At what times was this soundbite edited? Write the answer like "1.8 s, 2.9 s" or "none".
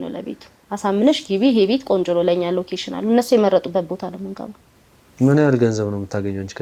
none